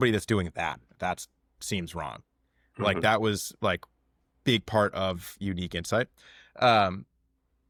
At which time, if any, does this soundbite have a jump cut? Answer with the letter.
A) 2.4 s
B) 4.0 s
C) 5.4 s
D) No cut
D